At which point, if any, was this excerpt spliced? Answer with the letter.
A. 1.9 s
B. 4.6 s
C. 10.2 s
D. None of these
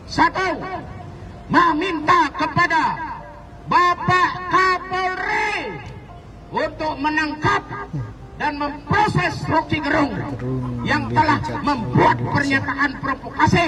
D